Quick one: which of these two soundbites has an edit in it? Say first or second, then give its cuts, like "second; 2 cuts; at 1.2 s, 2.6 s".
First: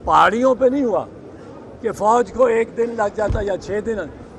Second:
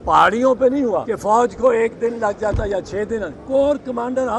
second; 2 cuts; at 0.9 s, 3.3 s